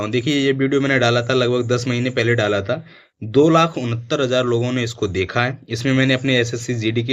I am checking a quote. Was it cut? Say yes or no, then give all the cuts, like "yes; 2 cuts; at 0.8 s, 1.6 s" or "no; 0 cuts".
no; 0 cuts